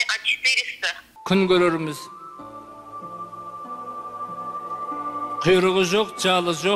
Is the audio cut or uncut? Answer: cut